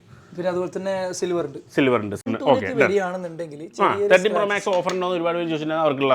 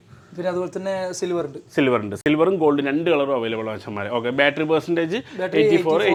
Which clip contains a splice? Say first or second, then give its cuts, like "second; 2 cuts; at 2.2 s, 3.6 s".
first; 1 cut; at 2.3 s